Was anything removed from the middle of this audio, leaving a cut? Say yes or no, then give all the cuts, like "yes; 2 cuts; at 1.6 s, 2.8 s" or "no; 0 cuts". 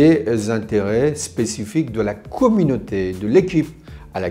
no; 0 cuts